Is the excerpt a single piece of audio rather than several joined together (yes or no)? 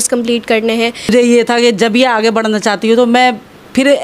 no